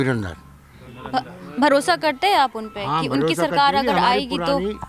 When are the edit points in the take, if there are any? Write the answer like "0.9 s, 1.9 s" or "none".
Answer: none

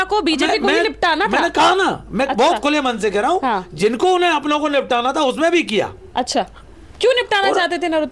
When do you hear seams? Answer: none

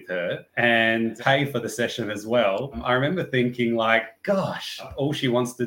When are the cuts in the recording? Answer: 1.1 s, 2.8 s, 4.9 s

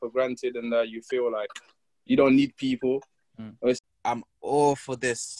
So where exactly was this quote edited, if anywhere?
3.8 s

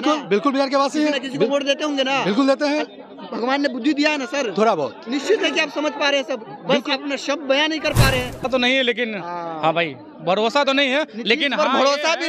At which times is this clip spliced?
8.4 s

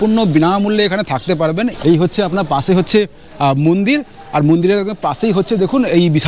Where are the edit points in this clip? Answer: 1.7 s

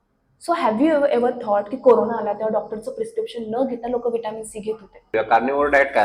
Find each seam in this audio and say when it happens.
5.1 s

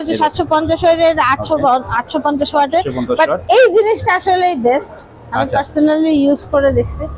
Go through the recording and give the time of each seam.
none

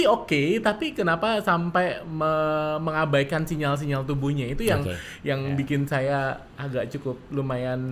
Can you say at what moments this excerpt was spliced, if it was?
none

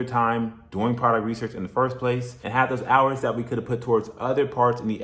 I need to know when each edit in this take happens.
2.3 s

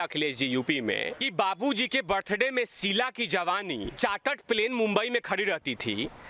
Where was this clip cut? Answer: 1.2 s, 3.9 s

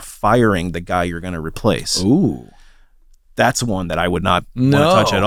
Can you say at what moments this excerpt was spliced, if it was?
none

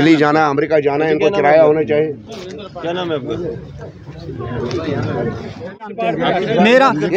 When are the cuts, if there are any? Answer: 5.9 s

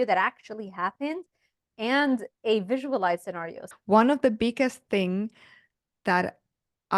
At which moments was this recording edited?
3.6 s

